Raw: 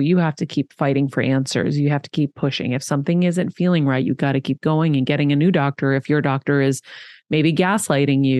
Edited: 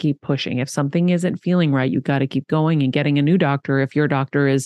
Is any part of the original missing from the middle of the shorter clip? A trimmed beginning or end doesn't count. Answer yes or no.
no